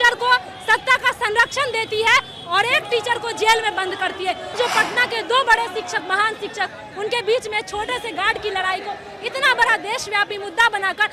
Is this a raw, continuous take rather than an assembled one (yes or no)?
no